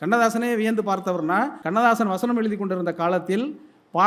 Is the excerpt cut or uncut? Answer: cut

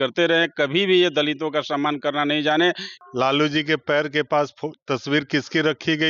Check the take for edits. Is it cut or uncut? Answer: cut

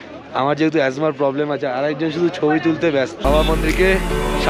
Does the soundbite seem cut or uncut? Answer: cut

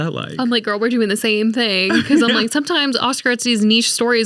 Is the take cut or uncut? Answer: uncut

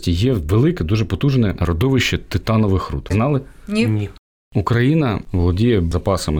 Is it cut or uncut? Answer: cut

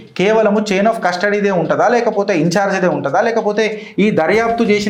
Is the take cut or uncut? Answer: uncut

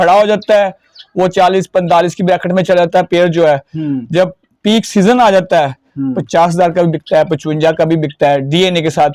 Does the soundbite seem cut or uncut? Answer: uncut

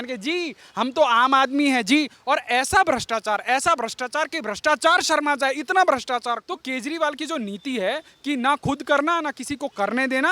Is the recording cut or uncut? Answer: cut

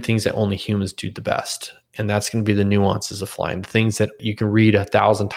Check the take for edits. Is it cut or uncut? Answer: cut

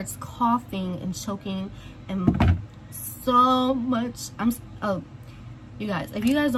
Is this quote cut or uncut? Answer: uncut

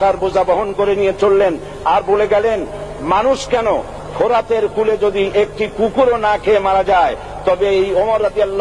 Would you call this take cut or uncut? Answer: uncut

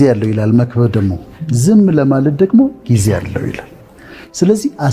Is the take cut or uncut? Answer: uncut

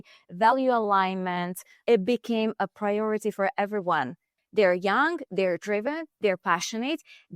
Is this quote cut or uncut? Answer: cut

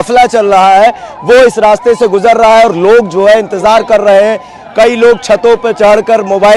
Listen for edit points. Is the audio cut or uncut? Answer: uncut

